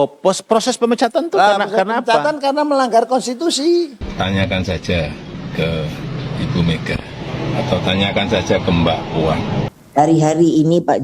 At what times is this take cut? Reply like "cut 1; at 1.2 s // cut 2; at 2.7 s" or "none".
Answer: cut 1; at 4.0 s // cut 2; at 5.3 s // cut 3; at 9.8 s